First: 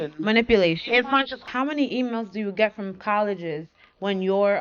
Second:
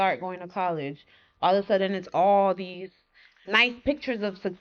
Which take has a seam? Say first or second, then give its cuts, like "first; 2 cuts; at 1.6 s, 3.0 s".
first; 1 cut; at 1.4 s